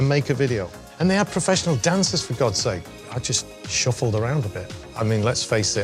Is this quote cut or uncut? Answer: cut